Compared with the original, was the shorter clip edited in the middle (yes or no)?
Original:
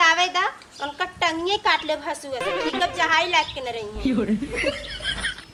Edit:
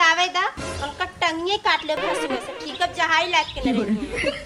yes